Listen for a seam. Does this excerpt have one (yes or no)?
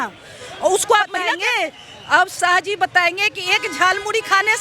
yes